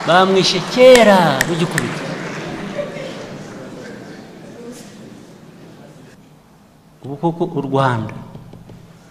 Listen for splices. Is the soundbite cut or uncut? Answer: cut